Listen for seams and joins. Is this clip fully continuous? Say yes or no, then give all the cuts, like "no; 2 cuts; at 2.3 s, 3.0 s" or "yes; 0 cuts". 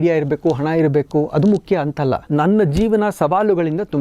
no; 1 cut; at 2.2 s